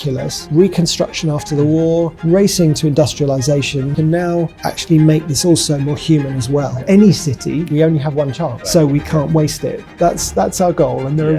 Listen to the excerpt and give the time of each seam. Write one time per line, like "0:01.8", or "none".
0:03.9
0:06.8
0:07.7
0:08.6
0:09.9

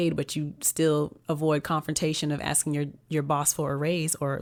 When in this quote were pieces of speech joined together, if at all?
none

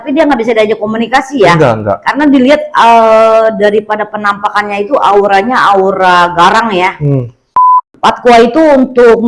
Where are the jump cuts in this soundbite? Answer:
0:07.7

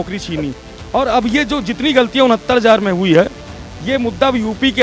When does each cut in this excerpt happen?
none

